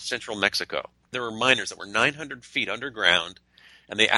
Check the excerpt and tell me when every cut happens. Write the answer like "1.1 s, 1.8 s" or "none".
1.1 s